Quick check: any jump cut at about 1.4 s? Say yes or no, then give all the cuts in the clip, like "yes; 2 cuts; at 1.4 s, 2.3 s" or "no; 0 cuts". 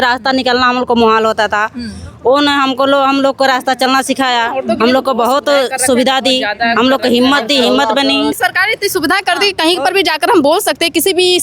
no; 1 cut; at 8.4 s